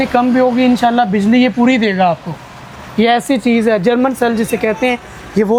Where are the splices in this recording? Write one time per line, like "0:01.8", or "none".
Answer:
none